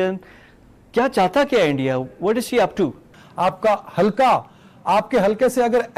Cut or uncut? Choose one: cut